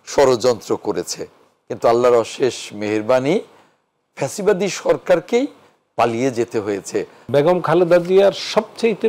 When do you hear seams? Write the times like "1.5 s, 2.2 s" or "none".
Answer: 7.2 s